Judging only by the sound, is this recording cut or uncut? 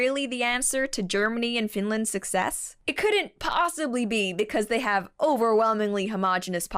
cut